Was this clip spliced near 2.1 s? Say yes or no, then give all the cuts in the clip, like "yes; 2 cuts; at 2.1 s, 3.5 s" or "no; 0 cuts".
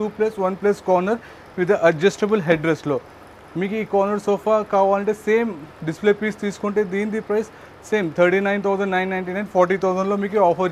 no; 0 cuts